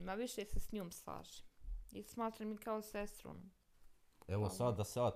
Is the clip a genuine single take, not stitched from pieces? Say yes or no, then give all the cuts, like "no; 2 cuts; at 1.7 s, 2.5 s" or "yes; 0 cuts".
yes; 0 cuts